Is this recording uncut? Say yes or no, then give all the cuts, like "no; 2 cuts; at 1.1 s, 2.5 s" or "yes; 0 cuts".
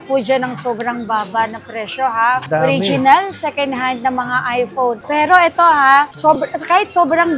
yes; 0 cuts